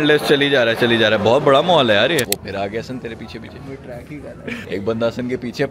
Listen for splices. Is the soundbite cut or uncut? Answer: cut